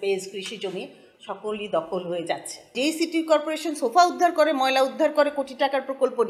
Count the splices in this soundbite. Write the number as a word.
one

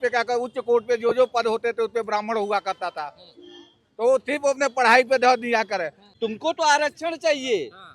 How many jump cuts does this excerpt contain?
one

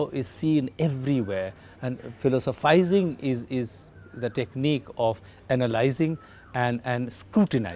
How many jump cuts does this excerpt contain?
zero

